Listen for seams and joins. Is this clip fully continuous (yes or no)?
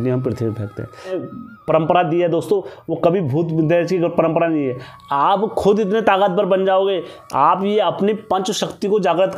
no